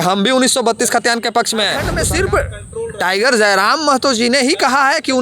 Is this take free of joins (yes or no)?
no